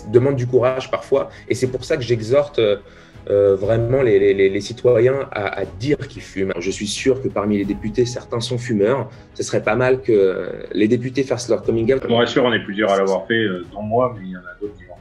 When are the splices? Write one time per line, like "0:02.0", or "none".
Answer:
0:06.6
0:12.0